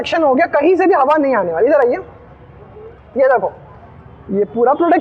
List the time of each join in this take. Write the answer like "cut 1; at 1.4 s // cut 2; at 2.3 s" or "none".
none